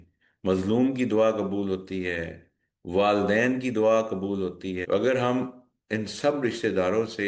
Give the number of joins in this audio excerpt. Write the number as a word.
one